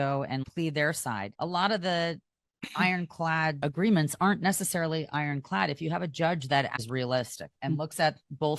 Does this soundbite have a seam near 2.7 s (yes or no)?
no